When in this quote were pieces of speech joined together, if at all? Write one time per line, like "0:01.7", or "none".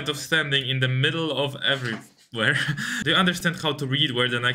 0:02.9